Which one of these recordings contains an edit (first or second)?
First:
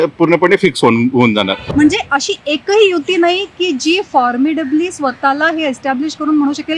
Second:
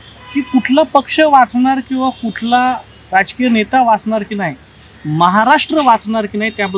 first